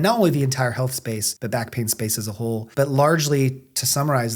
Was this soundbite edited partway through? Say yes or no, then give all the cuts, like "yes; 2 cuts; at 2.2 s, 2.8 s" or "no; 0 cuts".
yes; 2 cuts; at 1.3 s, 2.7 s